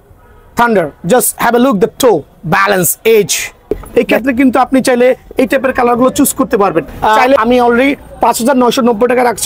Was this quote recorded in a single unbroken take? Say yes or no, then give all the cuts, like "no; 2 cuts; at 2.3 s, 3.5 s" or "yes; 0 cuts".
no; 2 cuts; at 3.8 s, 7.4 s